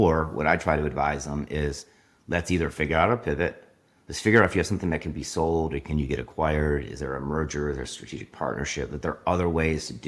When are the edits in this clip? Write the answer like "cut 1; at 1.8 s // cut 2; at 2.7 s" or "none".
none

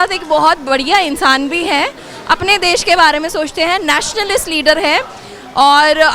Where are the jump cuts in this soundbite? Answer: none

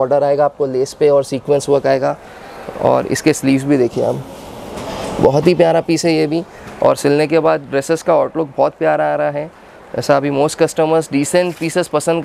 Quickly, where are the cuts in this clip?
none

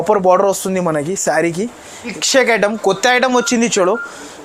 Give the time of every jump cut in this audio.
cut 1; at 2.1 s

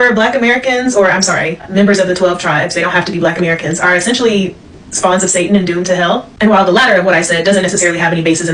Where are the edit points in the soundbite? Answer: none

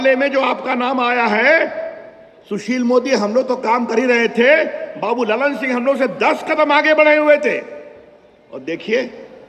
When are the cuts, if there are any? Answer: none

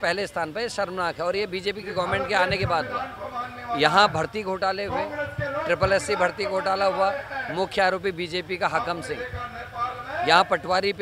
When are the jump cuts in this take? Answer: none

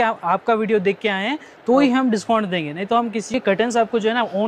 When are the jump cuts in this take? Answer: cut 1; at 3.3 s

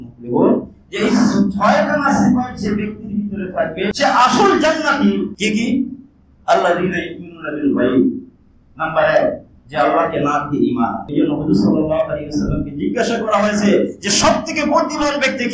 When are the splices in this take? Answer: cut 1; at 3.9 s // cut 2; at 5.3 s // cut 3; at 11.0 s

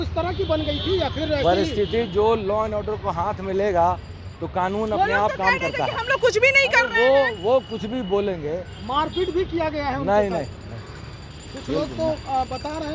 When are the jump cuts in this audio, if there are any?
none

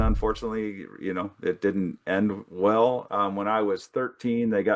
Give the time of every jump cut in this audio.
cut 1; at 3.0 s

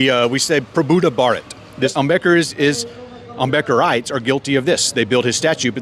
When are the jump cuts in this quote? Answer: cut 1; at 1.9 s

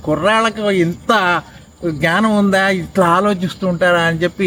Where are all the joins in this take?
none

